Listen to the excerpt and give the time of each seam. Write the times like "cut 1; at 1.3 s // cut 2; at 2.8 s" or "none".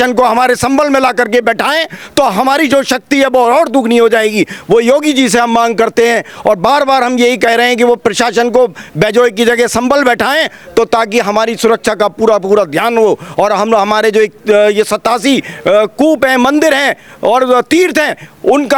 none